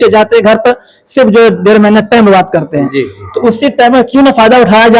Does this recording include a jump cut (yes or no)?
no